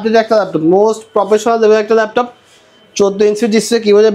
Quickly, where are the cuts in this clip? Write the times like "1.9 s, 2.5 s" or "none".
none